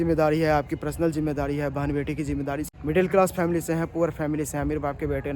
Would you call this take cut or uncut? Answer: cut